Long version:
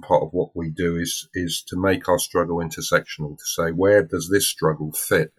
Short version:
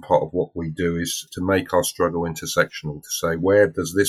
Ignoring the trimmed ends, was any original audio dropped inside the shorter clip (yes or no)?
yes